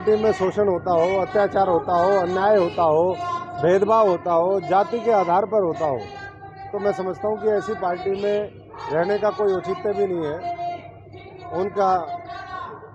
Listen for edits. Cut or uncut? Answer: uncut